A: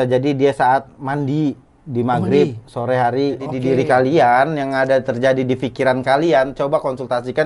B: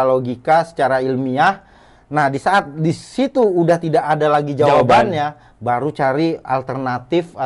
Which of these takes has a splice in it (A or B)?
A